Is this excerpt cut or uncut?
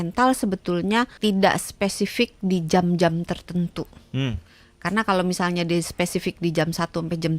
cut